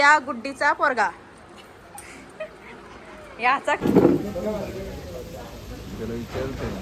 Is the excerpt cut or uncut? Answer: cut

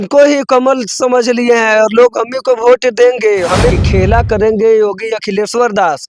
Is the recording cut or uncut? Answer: cut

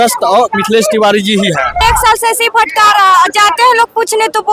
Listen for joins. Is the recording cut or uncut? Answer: cut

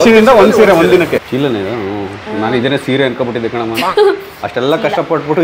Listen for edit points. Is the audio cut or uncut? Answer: cut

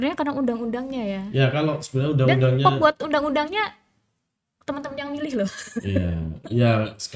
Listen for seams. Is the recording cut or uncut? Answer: uncut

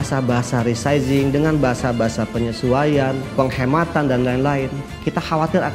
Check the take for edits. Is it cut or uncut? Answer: uncut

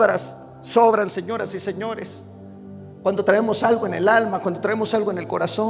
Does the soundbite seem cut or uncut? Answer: uncut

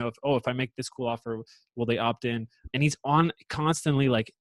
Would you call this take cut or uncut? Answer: cut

